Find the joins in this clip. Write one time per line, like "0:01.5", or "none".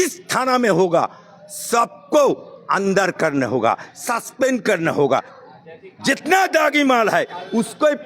0:05.1